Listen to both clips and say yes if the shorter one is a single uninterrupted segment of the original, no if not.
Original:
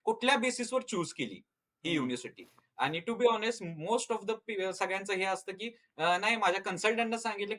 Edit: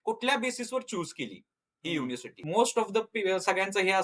no